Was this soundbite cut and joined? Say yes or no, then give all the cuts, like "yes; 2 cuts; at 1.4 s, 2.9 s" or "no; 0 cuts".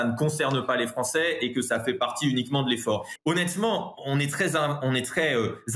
yes; 1 cut; at 3.1 s